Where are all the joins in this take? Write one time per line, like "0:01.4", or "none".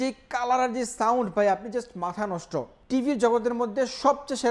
0:02.8